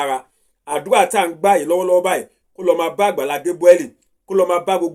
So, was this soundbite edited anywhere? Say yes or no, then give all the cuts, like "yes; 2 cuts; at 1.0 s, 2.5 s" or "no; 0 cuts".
no; 0 cuts